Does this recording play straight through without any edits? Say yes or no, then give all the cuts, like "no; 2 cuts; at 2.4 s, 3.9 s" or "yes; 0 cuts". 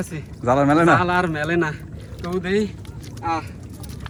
yes; 0 cuts